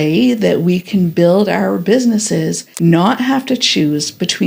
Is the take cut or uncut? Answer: cut